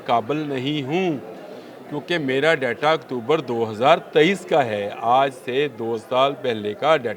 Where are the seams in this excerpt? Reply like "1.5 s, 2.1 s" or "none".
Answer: none